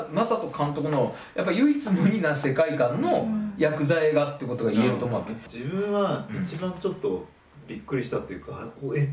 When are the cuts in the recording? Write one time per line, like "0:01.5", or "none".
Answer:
0:05.4